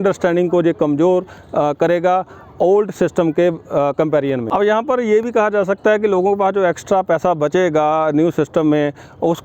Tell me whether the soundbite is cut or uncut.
cut